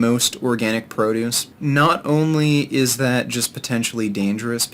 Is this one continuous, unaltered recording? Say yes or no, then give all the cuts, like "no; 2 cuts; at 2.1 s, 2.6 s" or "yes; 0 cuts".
no; 1 cut; at 1.4 s